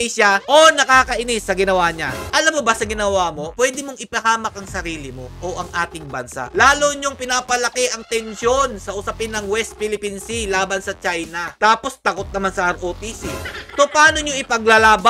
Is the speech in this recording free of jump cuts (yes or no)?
no